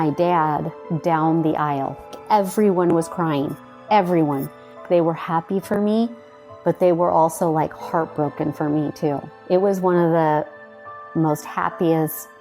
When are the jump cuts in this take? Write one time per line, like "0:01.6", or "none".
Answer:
0:02.2
0:04.8